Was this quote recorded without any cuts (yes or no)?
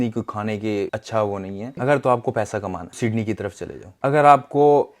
no